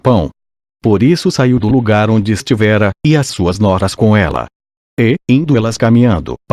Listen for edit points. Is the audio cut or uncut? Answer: uncut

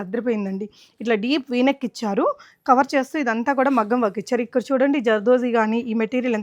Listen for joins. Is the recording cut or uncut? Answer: uncut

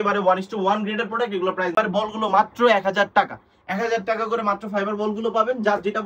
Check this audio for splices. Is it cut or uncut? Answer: cut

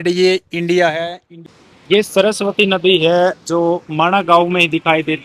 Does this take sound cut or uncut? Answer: cut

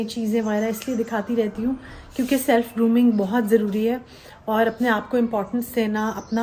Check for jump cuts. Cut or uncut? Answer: uncut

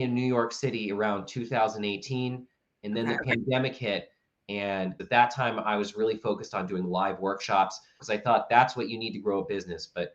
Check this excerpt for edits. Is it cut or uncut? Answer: cut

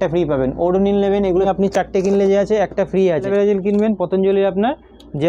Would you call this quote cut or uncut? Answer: cut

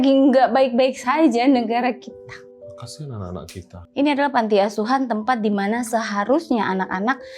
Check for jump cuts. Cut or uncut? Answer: cut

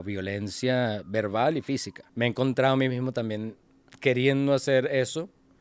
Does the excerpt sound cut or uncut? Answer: cut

